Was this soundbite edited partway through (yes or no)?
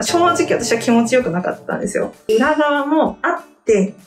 yes